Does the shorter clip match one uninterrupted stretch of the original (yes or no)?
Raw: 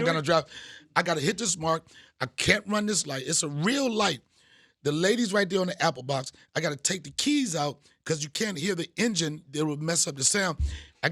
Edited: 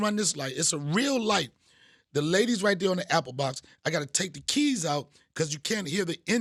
yes